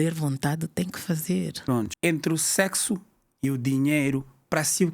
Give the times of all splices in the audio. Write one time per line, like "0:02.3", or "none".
0:01.9